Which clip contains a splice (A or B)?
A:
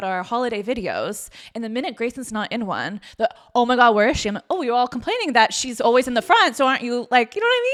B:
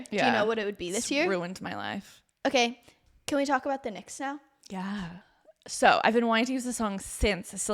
B